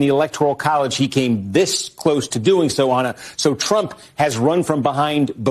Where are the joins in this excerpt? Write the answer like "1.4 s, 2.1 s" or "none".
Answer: none